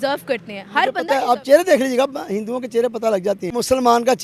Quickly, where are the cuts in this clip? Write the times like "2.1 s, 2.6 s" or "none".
1.0 s, 3.5 s